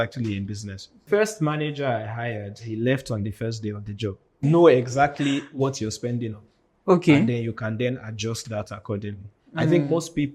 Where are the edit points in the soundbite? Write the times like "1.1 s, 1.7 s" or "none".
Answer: 1.0 s, 4.4 s